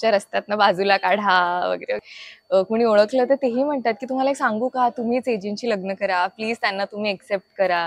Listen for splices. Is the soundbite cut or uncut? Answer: cut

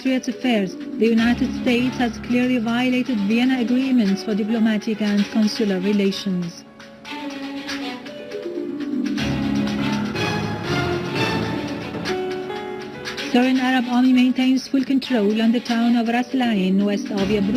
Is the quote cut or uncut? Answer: cut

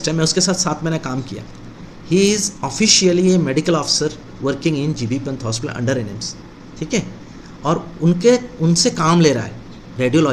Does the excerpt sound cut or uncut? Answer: uncut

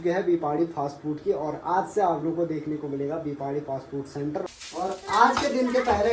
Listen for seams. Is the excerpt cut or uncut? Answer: cut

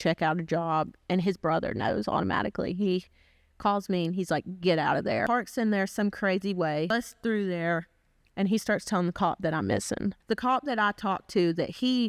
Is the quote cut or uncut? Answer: cut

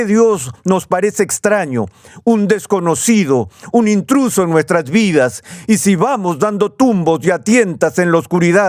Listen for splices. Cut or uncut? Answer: uncut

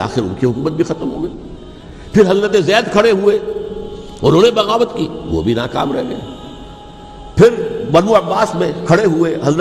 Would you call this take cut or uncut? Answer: uncut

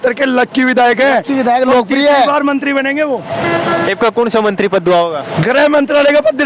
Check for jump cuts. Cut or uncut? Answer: uncut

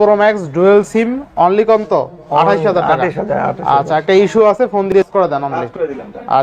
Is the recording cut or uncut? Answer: cut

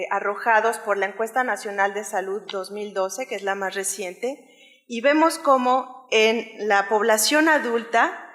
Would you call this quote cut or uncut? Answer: cut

